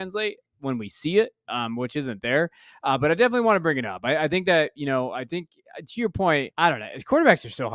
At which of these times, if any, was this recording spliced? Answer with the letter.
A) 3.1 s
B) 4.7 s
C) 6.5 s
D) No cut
C